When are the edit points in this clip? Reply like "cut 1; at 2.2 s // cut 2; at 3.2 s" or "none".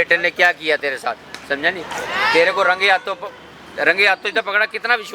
none